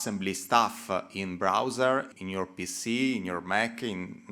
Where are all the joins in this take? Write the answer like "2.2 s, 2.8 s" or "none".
2.2 s